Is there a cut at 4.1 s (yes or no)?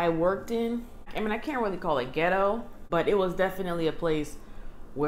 no